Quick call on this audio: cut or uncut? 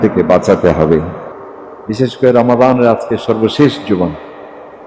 cut